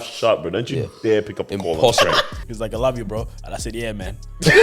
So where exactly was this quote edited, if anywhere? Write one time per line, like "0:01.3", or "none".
0:02.4